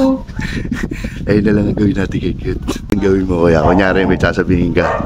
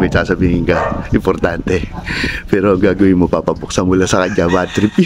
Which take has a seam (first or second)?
first